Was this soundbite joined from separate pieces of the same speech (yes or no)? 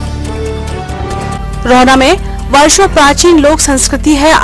yes